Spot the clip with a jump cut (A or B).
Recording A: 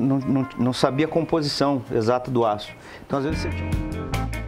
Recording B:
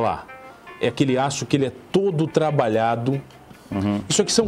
A